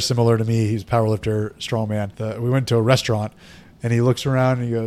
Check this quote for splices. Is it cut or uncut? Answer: cut